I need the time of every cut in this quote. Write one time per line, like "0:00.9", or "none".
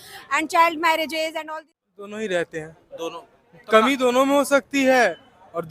0:01.4